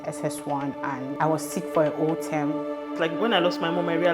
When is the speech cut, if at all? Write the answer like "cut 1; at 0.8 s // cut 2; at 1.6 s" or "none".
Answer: cut 1; at 1.1 s // cut 2; at 2.9 s